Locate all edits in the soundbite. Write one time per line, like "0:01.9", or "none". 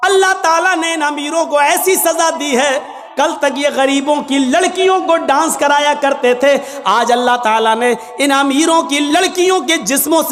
0:03.0

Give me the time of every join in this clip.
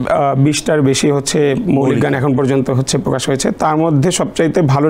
none

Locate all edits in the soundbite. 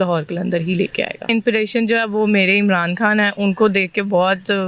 0:01.2

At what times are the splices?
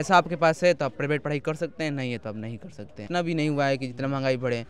0:03.0

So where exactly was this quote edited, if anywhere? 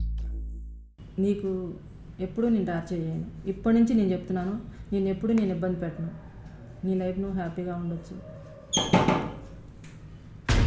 0:01.0

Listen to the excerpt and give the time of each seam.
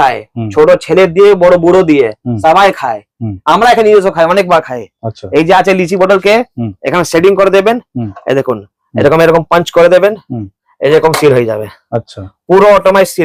none

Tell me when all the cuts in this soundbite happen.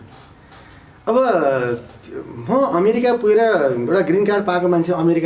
none

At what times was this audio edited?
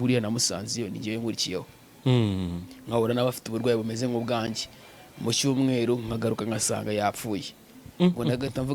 none

